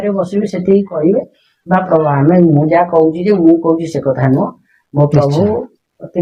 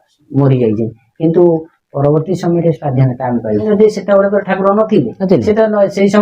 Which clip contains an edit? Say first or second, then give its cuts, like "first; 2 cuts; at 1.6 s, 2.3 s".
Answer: second; 1 cut; at 3.6 s